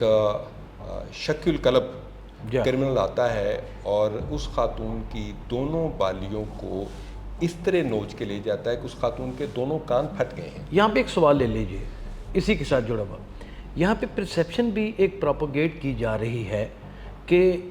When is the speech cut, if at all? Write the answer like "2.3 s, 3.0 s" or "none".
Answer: none